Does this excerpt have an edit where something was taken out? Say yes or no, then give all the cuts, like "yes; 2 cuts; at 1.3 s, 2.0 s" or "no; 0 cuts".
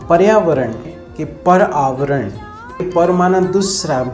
yes; 2 cuts; at 1.0 s, 2.9 s